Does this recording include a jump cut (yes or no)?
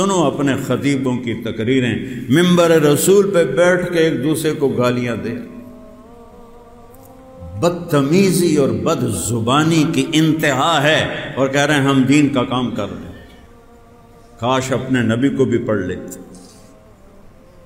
no